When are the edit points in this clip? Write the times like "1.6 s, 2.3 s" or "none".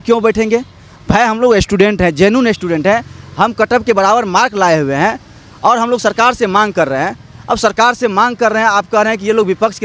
none